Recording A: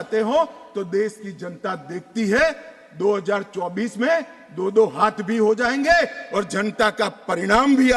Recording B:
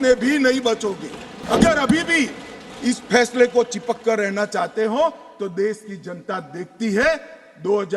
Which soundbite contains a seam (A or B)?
B